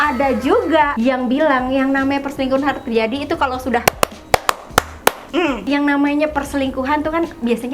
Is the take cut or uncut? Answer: cut